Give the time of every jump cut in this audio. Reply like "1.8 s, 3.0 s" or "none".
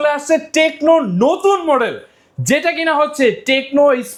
none